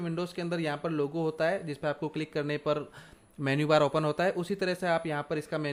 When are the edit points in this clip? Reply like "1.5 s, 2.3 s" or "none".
none